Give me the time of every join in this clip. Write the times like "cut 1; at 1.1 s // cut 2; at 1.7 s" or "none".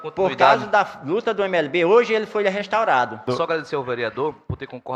cut 1; at 3.3 s

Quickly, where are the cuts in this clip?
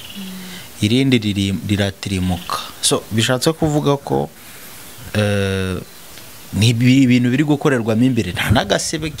none

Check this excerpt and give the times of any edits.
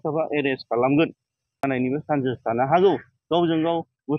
cut 1; at 1.6 s

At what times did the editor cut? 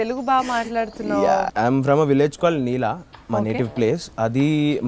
cut 1; at 1.5 s

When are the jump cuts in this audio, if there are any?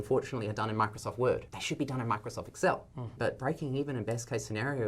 cut 1; at 1.5 s // cut 2; at 3.2 s

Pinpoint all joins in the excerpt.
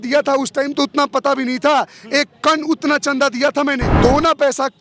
cut 1; at 3.9 s

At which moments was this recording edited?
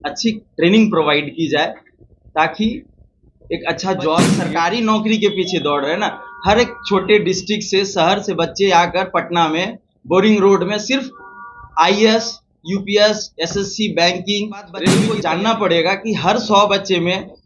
cut 1; at 4.4 s // cut 2; at 15.1 s

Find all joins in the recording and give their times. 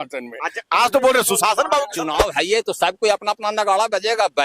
cut 1; at 2.1 s

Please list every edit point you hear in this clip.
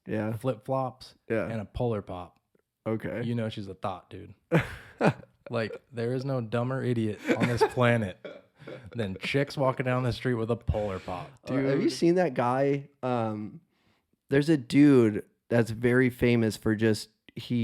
cut 1; at 11.4 s

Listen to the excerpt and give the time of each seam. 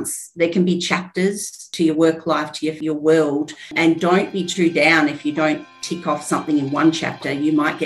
cut 1; at 1.7 s // cut 2; at 2.8 s // cut 3; at 3.7 s

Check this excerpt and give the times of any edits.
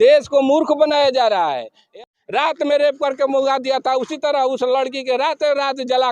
cut 1; at 2.0 s

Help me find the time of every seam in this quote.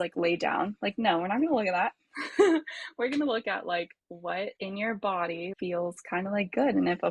cut 1; at 4.6 s // cut 2; at 5.5 s

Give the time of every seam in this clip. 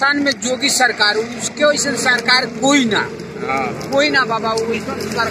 none

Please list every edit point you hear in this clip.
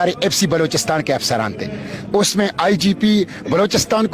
cut 1; at 2.0 s

